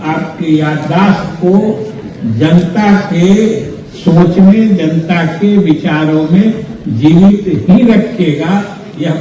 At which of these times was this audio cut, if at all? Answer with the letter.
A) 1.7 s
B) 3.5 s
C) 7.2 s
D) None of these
D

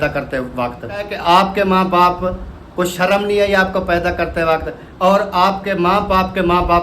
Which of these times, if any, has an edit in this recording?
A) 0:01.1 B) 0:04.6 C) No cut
A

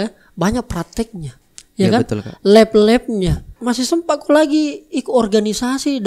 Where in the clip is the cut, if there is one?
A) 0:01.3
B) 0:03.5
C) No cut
B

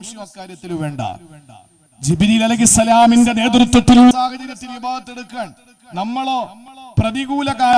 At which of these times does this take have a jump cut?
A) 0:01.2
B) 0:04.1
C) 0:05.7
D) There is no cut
B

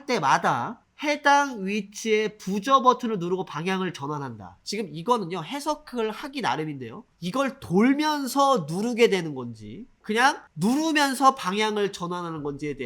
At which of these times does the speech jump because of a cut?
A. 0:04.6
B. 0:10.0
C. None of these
B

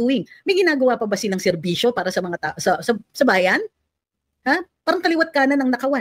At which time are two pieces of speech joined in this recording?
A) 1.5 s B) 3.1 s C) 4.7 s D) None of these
D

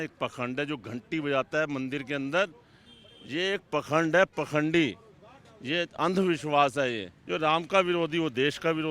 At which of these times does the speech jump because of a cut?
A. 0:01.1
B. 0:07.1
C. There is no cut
B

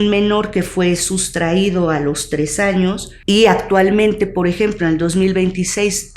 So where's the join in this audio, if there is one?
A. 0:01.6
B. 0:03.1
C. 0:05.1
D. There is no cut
B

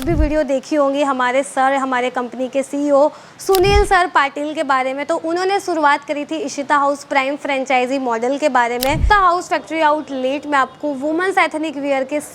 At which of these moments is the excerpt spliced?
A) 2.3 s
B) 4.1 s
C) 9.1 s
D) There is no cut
C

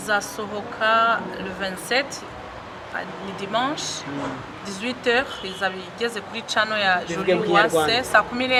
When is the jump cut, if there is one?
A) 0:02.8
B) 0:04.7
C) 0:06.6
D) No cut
D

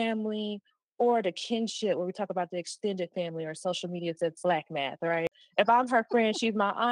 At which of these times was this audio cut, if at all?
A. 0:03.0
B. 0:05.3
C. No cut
B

